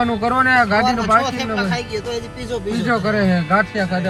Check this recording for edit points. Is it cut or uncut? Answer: uncut